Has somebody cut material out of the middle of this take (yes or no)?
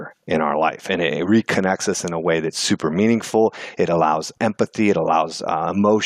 yes